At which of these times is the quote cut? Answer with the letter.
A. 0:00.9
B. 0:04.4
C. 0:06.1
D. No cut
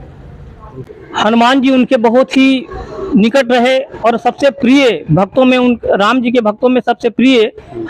A